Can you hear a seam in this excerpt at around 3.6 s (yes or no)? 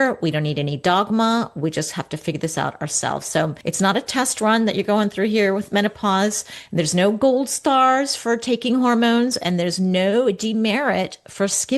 yes